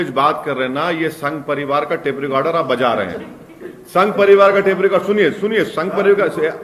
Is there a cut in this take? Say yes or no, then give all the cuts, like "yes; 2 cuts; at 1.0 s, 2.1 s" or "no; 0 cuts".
no; 0 cuts